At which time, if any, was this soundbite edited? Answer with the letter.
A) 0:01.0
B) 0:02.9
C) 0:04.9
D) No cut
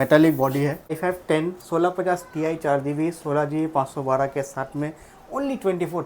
A